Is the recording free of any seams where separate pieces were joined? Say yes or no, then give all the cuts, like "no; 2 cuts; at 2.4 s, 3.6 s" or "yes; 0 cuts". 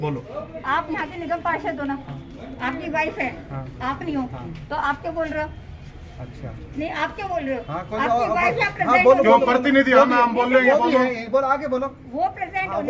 yes; 0 cuts